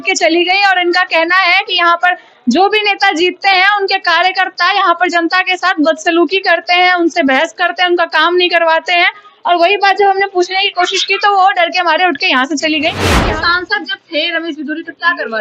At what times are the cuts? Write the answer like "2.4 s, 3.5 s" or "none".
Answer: 13.1 s